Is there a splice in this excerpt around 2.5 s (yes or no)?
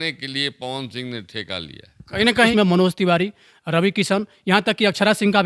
yes